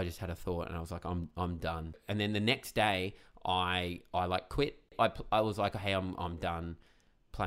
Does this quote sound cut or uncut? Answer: cut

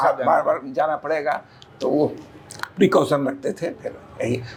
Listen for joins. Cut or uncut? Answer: uncut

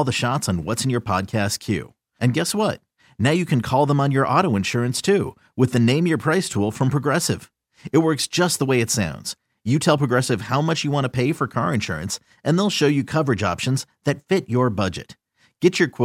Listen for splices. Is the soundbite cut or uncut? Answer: uncut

